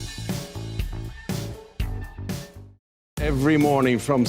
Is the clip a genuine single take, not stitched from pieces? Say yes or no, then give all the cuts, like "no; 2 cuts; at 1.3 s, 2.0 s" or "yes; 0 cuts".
no; 1 cut; at 2.9 s